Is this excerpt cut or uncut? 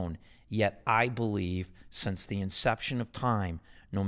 uncut